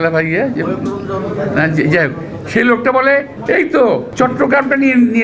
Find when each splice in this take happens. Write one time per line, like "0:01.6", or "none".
0:03.0
0:04.1